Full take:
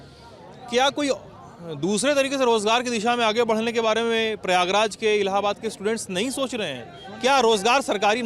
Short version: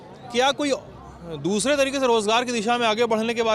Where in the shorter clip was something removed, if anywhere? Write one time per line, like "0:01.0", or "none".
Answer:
none